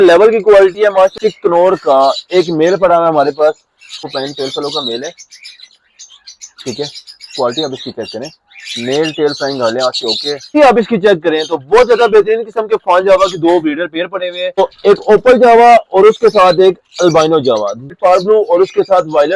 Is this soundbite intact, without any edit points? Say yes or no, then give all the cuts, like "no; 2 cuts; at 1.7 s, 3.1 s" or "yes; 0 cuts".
no; 5 cuts; at 1.1 s, 4.1 s, 10.5 s, 14.6 s, 17.9 s